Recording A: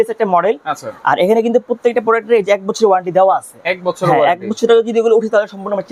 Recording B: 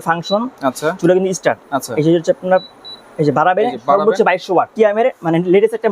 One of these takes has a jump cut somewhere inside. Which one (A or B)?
B